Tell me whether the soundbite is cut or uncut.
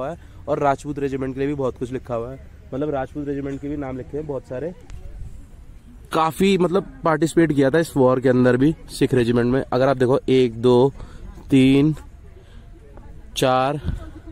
uncut